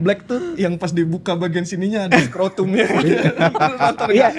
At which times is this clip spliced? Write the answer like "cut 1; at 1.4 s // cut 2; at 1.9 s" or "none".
none